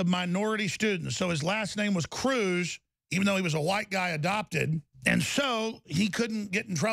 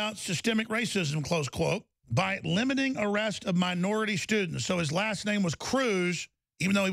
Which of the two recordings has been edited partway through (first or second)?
first